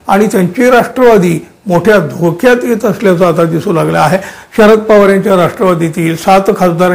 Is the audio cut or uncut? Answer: cut